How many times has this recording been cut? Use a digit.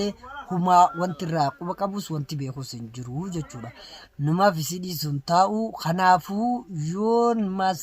1